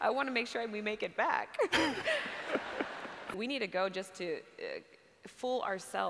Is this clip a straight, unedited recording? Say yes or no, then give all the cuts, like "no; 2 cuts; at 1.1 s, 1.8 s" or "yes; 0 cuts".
no; 1 cut; at 3.2 s